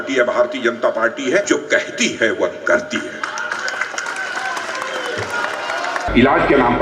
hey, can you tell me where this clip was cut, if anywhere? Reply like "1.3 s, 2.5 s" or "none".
1.4 s, 6.0 s